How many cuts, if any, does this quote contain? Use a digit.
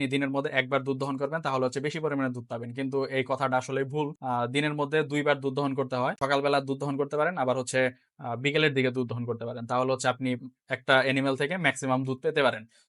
0